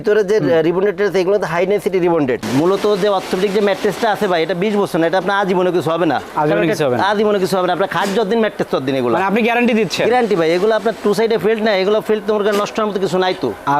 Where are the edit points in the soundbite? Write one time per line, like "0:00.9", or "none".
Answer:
0:02.4